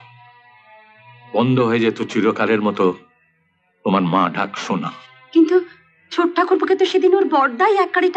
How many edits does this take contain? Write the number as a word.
zero